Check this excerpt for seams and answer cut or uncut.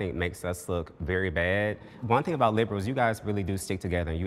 cut